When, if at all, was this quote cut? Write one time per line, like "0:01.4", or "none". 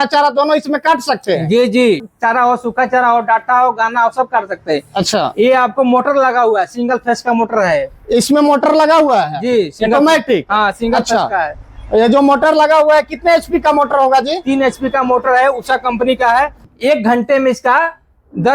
0:02.0
0:16.6